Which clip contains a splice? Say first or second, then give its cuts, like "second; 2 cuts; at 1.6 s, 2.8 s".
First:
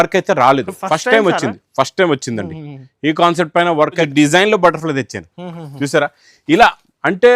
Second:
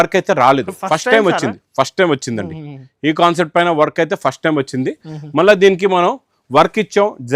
first; 1 cut; at 4.1 s